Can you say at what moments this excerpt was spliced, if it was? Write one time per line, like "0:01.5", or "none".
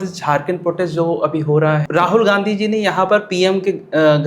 0:01.9